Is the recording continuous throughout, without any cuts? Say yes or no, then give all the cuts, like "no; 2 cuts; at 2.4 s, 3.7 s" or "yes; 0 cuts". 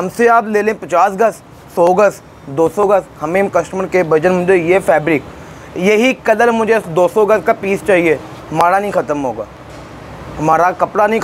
yes; 0 cuts